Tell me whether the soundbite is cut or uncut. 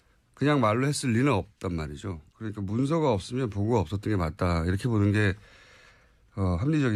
uncut